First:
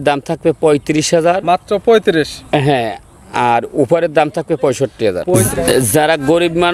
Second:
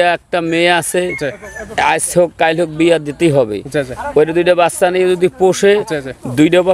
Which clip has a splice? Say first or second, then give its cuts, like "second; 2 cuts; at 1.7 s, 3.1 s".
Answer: first; 1 cut; at 5.3 s